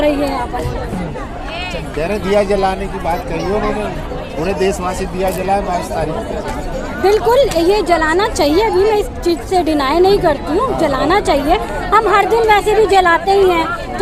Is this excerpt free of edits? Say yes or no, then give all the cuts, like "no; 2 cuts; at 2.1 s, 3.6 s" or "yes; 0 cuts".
yes; 0 cuts